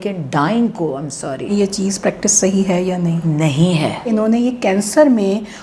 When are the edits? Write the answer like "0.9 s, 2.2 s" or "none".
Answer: 1.5 s, 4.1 s

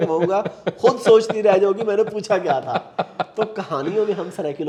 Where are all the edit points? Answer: none

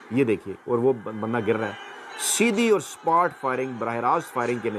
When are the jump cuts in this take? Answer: none

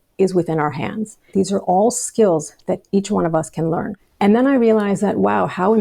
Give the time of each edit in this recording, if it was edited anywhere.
1.3 s, 3.9 s

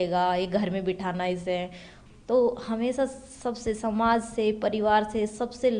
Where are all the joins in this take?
none

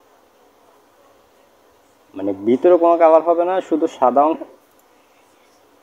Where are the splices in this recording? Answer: 4.4 s

